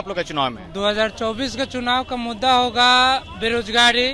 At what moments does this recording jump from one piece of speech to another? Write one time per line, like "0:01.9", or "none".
none